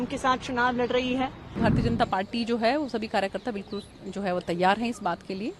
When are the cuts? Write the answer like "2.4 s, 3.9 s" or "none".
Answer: 1.6 s